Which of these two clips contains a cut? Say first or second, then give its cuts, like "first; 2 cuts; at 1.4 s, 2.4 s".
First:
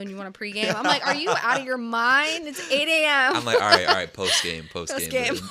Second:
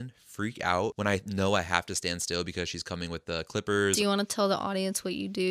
second; 2 cuts; at 1.0 s, 4.0 s